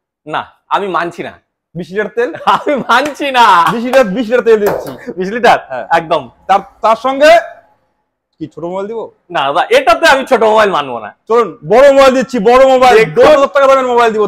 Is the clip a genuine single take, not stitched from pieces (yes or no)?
yes